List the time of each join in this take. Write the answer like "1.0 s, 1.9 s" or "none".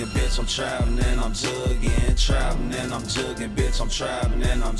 none